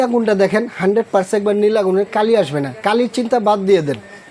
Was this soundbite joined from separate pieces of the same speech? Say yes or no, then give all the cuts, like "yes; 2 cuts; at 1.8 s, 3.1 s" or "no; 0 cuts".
no; 0 cuts